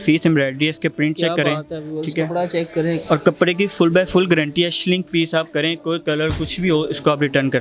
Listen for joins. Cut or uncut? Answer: uncut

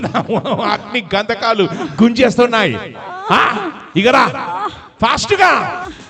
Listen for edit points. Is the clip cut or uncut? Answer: uncut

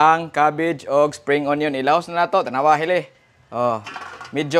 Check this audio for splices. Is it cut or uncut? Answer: uncut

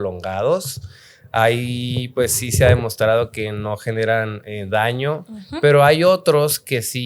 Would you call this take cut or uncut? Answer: uncut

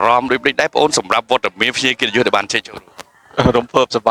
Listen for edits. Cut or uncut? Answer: uncut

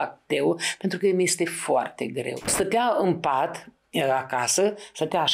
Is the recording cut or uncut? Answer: cut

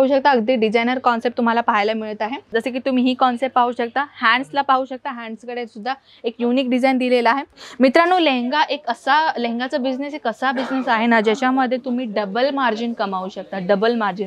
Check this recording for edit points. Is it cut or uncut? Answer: cut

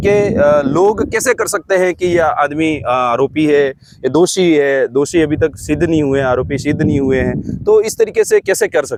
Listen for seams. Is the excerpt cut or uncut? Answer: uncut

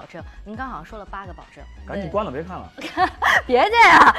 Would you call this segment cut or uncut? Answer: cut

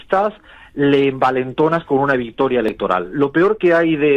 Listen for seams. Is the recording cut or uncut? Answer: uncut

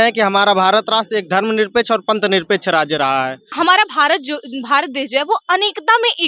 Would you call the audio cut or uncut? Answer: cut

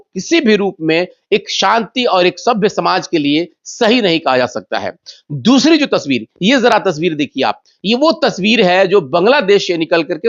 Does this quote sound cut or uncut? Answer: uncut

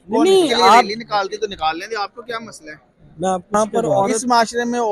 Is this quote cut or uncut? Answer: cut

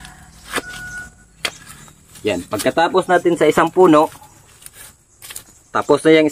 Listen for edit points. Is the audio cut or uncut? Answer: uncut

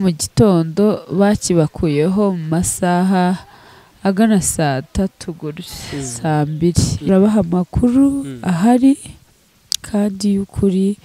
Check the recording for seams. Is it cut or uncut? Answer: cut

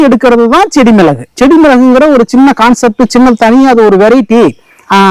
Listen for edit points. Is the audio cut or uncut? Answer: cut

